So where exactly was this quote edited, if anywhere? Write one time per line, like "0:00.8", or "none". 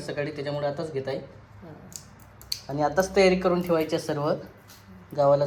none